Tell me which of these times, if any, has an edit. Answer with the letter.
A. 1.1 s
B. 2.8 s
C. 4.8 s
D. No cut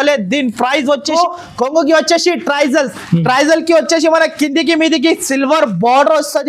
A